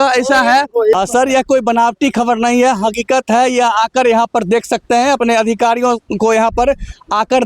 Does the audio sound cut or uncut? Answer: cut